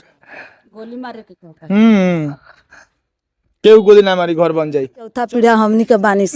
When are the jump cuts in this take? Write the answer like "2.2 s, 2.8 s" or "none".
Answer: 5.2 s